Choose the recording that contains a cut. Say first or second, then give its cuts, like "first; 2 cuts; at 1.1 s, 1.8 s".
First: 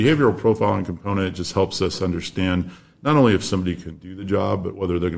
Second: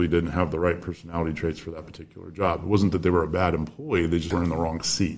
second; 1 cut; at 4.3 s